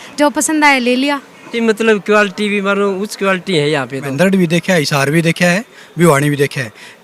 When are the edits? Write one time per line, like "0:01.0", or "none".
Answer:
0:01.5
0:04.1